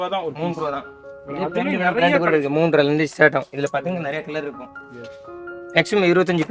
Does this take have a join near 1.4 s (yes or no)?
no